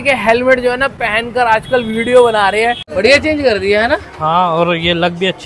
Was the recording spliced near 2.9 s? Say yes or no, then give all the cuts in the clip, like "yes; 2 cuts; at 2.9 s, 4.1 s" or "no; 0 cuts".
yes; 1 cut; at 2.9 s